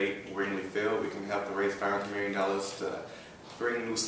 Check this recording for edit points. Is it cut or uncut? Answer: uncut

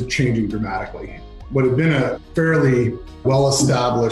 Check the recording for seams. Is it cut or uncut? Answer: cut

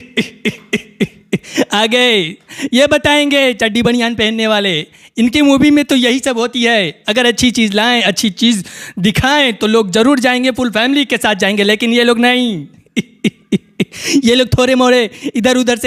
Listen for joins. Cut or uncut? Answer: uncut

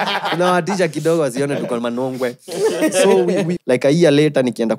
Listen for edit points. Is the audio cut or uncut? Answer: cut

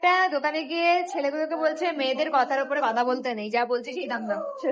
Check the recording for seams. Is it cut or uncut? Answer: uncut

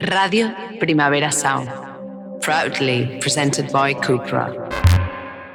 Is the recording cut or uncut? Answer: uncut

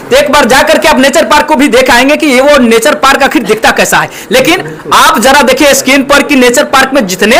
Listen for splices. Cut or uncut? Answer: uncut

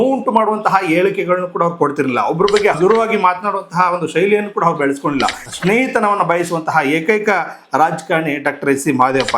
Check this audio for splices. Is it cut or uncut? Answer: cut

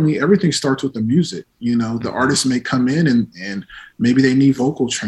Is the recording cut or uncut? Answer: uncut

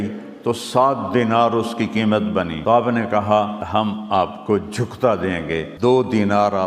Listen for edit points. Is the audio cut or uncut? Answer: cut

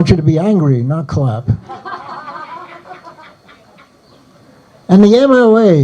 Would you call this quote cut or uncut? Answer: cut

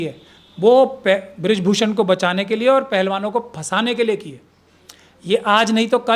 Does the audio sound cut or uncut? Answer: uncut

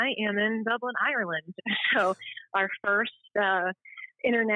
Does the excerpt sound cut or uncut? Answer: uncut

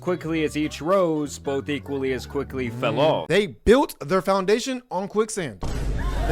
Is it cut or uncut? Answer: cut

